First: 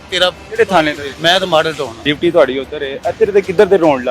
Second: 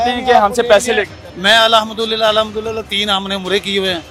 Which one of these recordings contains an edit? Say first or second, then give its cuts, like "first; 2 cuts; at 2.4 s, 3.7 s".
first; 2 cuts; at 1.1 s, 2.0 s